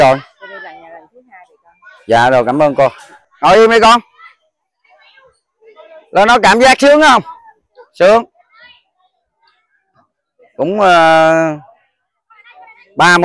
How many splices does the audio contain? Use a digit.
1